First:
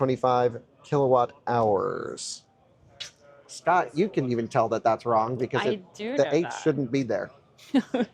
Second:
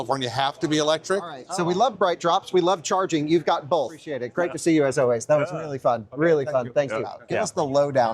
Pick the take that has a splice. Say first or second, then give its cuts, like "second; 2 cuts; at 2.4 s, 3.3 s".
second; 3 cuts; at 1.4 s, 4.2 s, 7.2 s